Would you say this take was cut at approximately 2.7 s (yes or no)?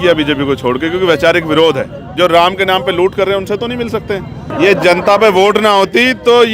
no